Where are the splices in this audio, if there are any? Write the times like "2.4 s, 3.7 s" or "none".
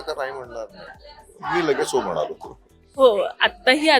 none